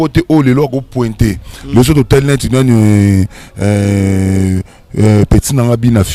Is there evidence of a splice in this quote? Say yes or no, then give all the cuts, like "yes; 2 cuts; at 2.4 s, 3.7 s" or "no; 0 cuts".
no; 0 cuts